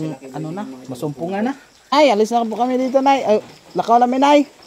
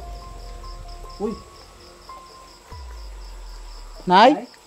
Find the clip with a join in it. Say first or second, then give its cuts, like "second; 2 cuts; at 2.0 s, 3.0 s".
first; 1 cut; at 1.9 s